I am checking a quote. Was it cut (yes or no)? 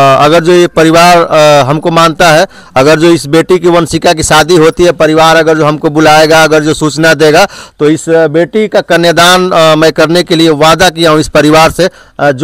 no